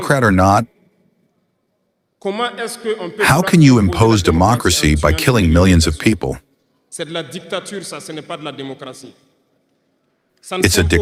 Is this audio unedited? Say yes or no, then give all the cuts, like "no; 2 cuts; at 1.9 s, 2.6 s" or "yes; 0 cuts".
yes; 0 cuts